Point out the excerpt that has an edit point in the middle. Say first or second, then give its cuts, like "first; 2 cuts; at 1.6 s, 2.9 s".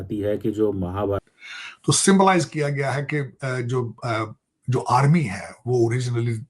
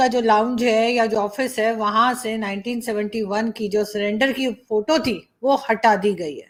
first; 1 cut; at 1.2 s